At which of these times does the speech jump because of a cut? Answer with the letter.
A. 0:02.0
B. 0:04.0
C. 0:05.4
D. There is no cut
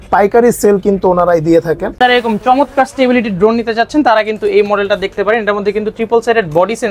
A